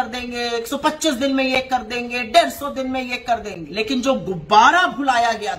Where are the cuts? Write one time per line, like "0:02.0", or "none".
0:03.6